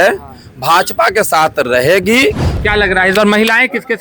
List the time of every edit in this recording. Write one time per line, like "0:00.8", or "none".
0:02.5